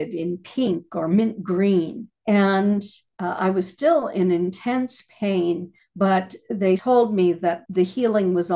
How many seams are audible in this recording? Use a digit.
2